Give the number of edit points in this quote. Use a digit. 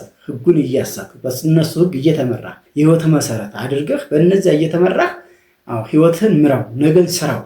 1